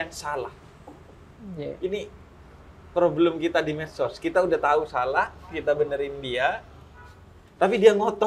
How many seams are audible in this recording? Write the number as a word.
zero